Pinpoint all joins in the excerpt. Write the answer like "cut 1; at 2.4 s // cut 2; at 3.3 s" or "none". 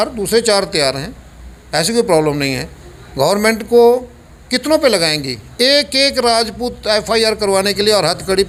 none